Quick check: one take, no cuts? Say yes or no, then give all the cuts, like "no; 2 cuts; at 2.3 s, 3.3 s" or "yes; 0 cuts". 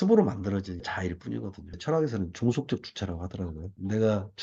yes; 0 cuts